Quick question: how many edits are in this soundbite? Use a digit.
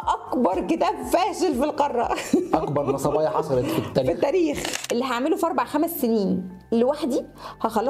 1